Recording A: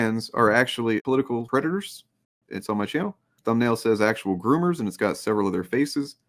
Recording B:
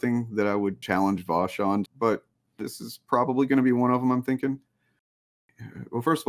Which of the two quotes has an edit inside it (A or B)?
B